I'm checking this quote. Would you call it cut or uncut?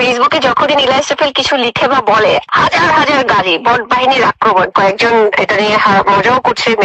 cut